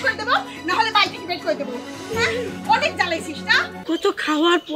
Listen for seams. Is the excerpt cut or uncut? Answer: cut